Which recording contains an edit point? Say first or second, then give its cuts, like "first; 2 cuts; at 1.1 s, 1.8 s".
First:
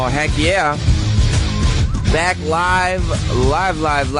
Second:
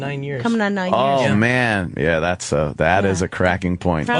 second; 1 cut; at 1.5 s